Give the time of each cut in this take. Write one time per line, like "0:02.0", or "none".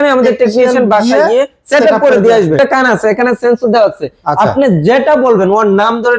0:02.6